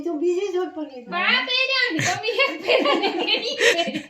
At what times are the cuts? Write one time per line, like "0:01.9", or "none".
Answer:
none